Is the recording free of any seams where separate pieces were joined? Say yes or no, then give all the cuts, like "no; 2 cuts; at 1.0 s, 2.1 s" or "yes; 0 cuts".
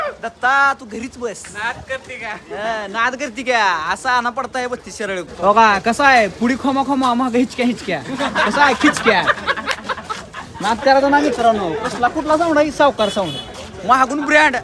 no; 1 cut; at 5.3 s